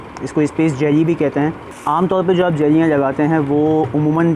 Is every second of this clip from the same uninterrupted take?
no; 1 cut; at 1.7 s

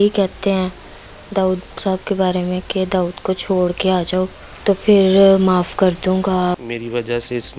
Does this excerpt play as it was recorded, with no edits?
no; 2 cuts; at 4.5 s, 6.6 s

